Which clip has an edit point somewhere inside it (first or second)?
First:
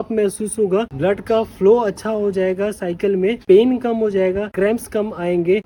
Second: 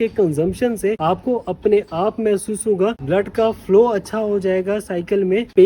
second